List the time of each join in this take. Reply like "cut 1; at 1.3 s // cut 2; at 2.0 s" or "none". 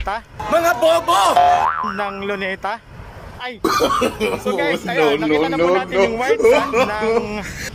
none

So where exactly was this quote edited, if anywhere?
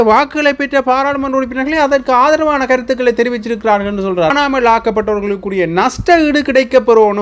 cut 1; at 4.3 s

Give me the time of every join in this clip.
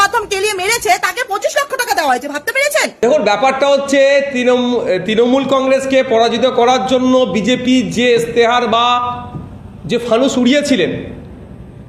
cut 1; at 2.9 s

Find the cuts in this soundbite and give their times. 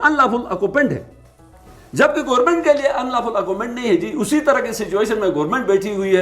none

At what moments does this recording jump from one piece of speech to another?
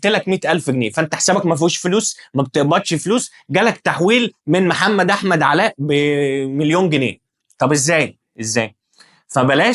none

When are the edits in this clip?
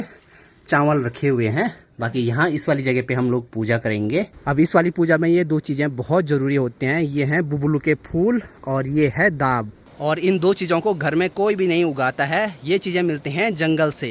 none

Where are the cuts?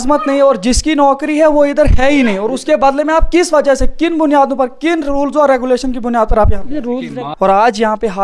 cut 1; at 7.1 s

